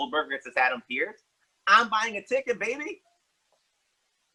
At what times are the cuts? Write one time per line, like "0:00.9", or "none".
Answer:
none